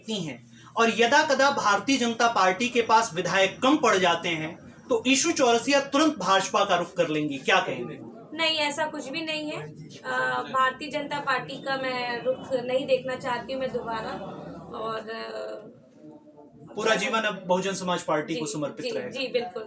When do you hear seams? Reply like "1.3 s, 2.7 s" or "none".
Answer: none